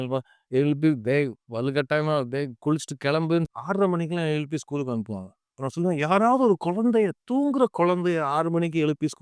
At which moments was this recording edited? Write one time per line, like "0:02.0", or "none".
0:03.5